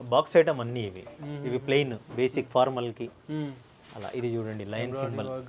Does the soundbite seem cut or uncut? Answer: uncut